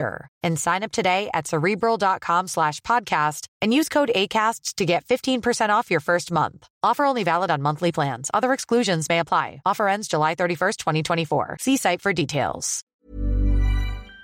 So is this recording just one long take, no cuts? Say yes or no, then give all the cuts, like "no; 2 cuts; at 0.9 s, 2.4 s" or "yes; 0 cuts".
no; 1 cut; at 13.0 s